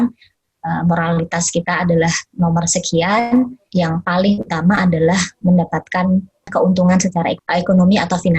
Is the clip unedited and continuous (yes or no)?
no